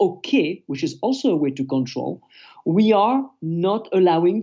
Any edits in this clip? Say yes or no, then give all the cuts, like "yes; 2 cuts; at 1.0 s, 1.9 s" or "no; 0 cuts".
no; 0 cuts